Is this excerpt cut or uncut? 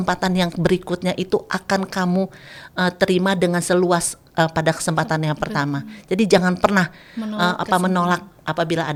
uncut